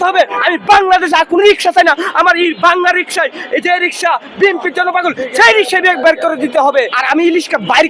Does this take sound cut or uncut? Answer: cut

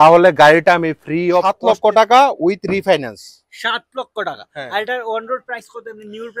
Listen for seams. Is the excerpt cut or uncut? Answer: cut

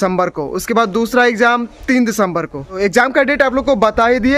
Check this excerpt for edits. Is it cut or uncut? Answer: cut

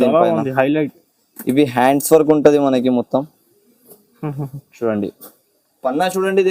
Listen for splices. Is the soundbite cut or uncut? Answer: uncut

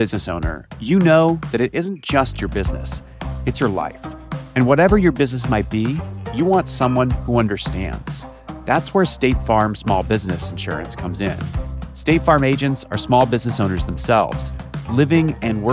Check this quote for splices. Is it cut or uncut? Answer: uncut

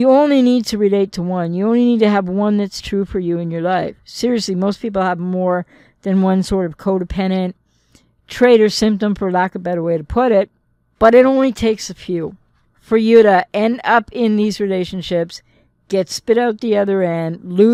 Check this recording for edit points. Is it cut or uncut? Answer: uncut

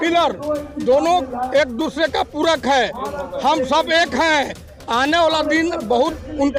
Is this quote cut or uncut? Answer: uncut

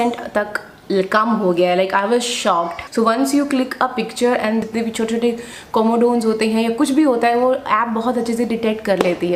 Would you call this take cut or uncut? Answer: cut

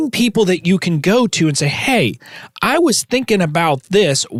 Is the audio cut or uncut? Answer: uncut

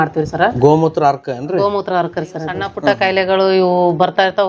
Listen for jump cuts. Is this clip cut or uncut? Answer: cut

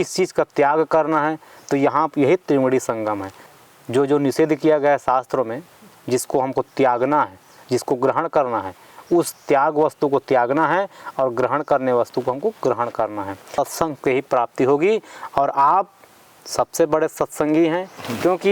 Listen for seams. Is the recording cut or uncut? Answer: cut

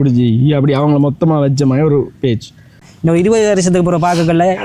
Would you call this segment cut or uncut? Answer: cut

